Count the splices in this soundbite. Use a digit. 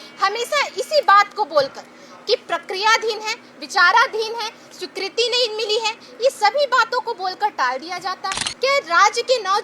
1